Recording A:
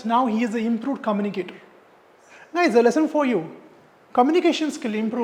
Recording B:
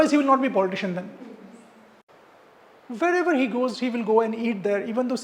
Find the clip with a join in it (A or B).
B